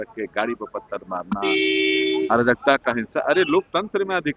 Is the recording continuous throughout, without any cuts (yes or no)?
yes